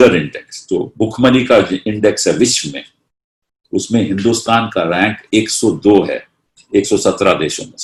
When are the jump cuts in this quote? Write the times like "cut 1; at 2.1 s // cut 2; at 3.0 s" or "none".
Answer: none